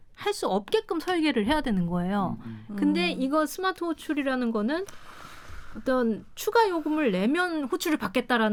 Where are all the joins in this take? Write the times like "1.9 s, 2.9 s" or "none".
none